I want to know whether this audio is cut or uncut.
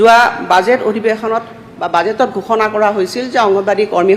uncut